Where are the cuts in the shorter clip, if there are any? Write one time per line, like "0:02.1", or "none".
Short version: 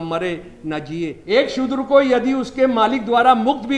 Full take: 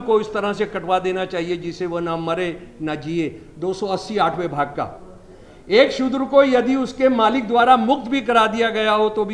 0:01.2